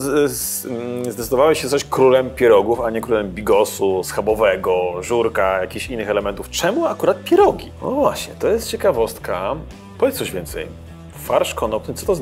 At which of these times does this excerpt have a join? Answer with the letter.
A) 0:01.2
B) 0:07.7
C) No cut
B